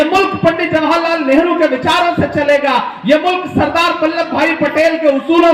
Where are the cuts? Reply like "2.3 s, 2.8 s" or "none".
none